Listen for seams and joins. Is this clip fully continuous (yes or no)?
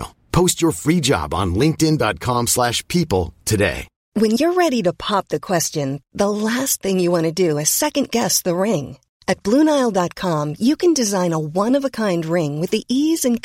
no